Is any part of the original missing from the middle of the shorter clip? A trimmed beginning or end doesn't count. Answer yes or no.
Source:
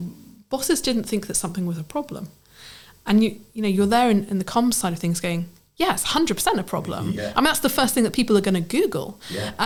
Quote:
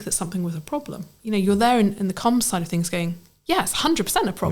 yes